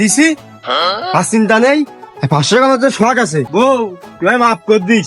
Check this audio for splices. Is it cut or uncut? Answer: cut